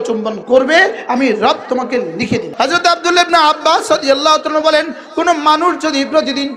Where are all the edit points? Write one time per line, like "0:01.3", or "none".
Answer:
0:02.5